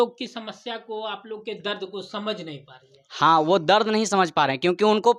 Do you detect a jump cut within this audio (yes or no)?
no